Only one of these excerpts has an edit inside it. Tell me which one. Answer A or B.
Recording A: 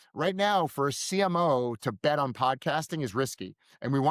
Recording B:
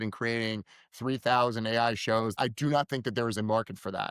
B